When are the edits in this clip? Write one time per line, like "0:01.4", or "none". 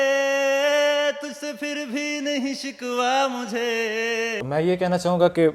0:04.4